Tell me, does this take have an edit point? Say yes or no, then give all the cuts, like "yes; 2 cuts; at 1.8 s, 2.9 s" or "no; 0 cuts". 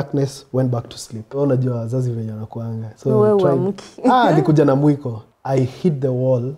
yes; 2 cuts; at 1.4 s, 5.2 s